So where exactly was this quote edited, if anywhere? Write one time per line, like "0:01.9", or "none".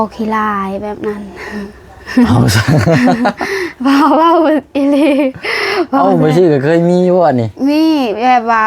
none